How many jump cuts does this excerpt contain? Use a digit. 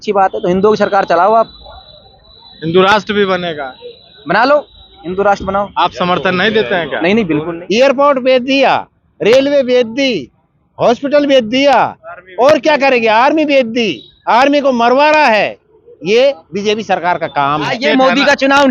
2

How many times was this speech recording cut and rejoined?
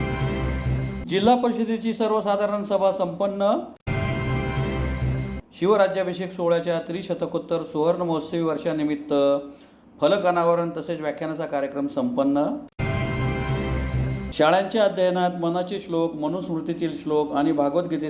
1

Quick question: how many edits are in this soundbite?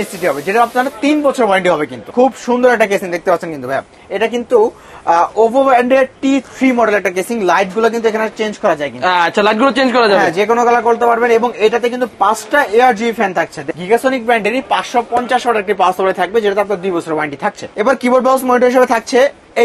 3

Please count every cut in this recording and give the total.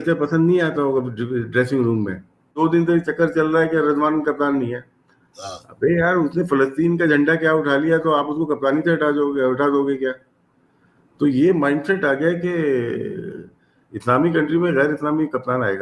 1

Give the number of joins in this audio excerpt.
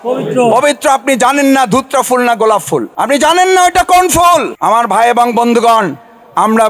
2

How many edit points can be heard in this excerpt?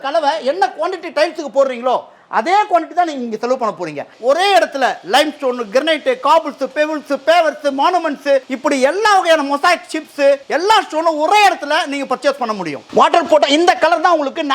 4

